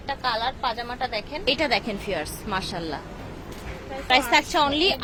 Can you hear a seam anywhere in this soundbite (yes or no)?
no